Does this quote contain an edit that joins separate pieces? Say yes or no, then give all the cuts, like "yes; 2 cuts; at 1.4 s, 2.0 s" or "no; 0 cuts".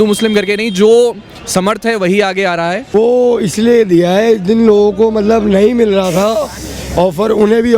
yes; 1 cut; at 2.9 s